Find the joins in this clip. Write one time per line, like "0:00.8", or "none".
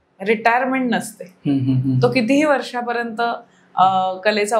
none